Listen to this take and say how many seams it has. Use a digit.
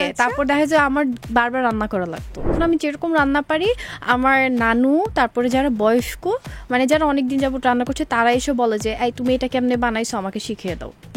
1